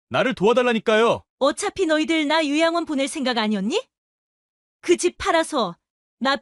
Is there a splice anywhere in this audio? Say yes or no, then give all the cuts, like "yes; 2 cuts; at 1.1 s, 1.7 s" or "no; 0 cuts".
yes; 1 cut; at 1.3 s